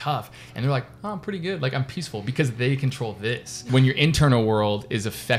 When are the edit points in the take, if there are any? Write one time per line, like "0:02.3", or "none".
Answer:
0:03.7